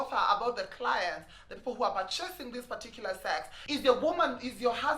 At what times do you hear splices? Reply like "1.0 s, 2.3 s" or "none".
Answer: 3.5 s